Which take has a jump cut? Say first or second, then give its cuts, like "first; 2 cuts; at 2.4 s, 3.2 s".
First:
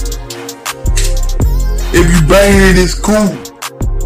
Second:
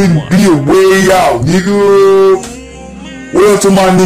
first; 1 cut; at 1.3 s